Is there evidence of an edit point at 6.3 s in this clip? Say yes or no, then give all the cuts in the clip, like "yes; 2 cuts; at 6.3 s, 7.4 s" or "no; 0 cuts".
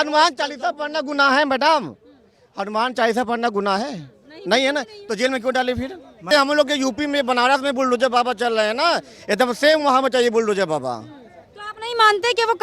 yes; 1 cut; at 6.3 s